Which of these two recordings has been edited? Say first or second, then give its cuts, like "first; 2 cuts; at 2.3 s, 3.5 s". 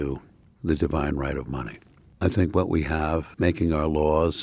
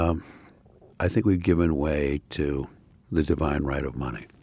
first; 1 cut; at 3.3 s